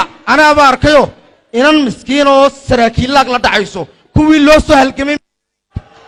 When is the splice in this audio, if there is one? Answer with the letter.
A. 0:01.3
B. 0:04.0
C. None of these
C